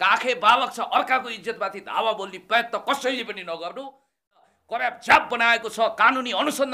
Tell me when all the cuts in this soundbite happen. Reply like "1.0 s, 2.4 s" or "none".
4.5 s

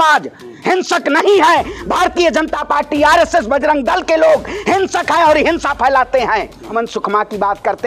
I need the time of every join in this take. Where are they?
6.7 s

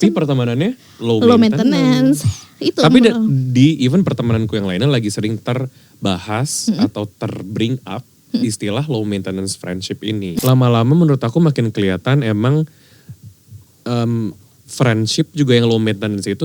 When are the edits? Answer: 10.4 s

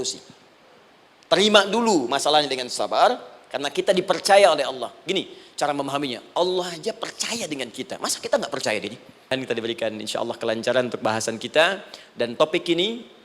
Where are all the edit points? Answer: 9.3 s

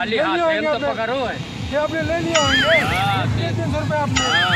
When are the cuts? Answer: none

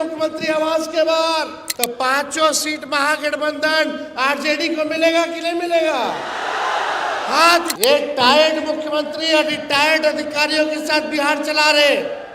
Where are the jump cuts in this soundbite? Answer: 1.6 s, 7.7 s

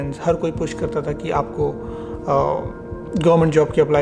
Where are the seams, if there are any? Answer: none

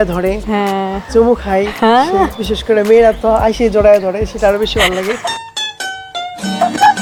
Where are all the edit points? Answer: none

